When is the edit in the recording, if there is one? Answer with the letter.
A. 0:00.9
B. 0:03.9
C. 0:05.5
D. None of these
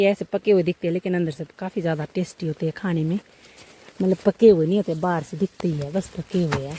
D